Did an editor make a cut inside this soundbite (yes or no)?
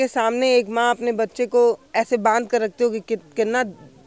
no